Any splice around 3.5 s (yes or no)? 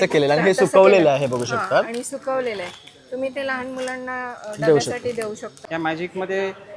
no